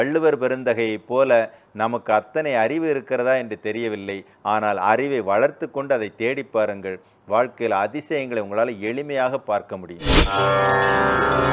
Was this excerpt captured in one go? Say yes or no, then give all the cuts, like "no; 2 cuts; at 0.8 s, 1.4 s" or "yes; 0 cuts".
no; 1 cut; at 10.3 s